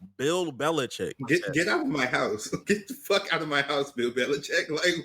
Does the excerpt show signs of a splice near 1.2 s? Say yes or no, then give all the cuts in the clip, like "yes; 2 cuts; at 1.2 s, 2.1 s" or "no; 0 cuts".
yes; 2 cuts; at 1.2 s, 2.6 s